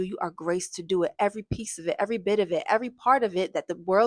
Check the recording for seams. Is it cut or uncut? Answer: uncut